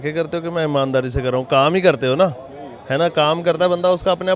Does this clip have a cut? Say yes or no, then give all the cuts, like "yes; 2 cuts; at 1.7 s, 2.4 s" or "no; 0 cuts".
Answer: no; 0 cuts